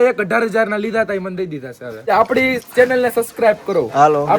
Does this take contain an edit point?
yes; 1 cut; at 2.1 s

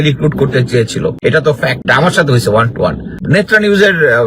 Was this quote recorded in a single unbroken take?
no; 2 cuts; at 1.3 s, 3.2 s

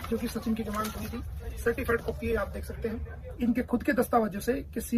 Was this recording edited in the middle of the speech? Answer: yes; 1 cut; at 3.2 s

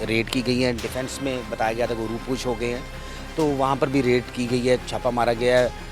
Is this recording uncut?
yes; 0 cuts

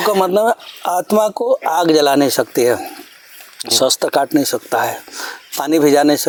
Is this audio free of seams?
yes; 0 cuts

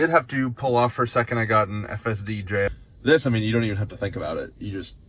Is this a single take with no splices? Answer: no; 1 cut; at 2.7 s

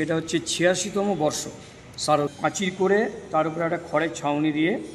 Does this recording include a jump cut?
yes; 1 cut; at 2.3 s

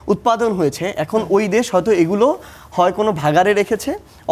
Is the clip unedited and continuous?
yes; 0 cuts

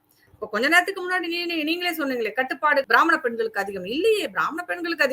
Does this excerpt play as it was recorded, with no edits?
no; 1 cut; at 2.8 s

